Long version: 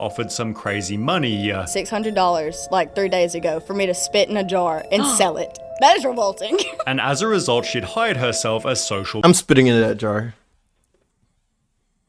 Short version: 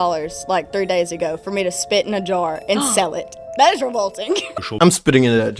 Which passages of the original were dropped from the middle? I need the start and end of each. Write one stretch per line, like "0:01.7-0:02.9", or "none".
0:06.8-0:09.0

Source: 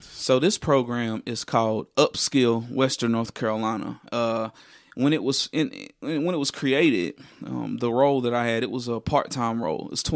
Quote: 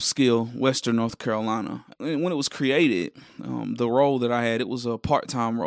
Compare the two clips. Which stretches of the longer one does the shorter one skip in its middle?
0:04.0-0:05.8

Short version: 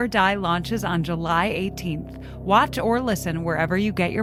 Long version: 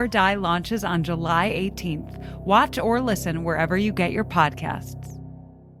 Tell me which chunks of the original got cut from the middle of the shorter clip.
none

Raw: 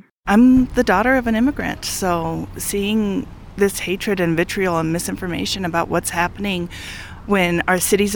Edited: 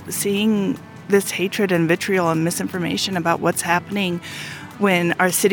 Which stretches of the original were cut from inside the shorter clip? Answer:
none

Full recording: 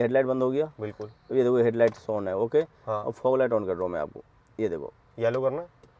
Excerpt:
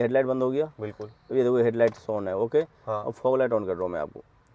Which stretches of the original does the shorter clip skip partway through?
none

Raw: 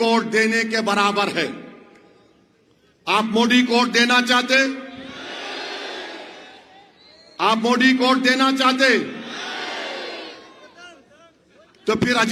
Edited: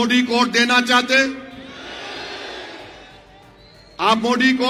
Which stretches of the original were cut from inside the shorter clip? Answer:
none

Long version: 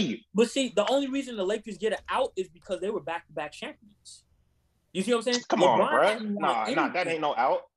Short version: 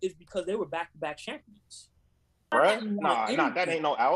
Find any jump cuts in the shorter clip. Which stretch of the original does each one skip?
0:04.8-0:05.9

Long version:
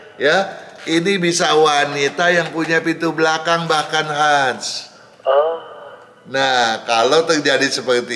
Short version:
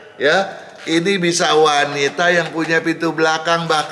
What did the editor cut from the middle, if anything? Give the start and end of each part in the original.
none

